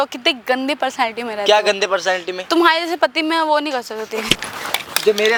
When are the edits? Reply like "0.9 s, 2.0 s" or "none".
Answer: none